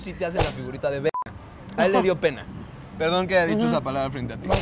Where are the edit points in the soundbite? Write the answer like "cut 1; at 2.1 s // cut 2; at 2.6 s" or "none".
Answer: none